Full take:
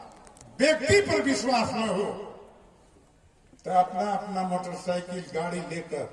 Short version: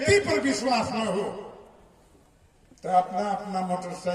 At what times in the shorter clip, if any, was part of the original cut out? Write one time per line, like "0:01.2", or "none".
none